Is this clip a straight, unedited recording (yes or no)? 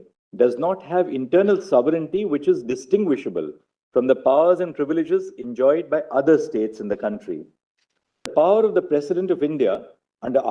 no